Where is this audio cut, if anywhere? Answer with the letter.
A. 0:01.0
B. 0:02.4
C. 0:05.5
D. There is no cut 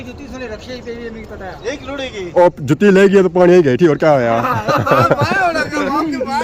D